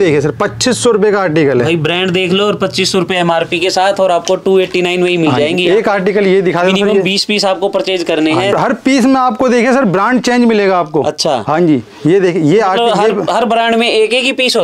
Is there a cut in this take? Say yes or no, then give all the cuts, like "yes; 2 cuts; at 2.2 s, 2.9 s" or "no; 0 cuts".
no; 0 cuts